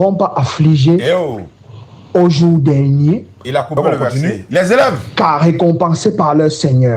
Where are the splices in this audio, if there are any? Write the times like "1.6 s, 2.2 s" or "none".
5.0 s